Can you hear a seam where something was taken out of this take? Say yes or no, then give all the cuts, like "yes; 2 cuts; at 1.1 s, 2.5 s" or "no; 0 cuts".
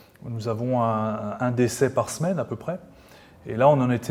no; 0 cuts